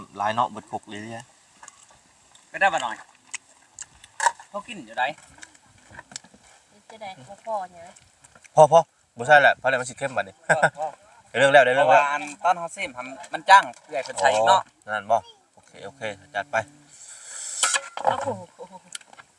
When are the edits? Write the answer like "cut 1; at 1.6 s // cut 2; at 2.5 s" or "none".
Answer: none